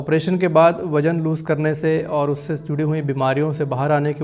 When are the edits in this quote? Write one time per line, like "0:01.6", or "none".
none